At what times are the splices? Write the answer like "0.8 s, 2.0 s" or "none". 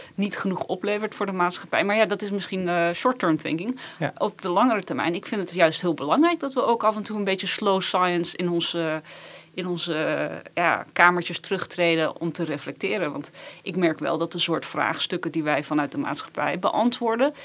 none